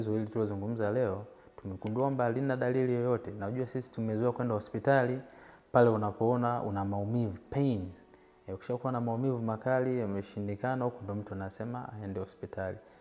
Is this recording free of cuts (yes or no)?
yes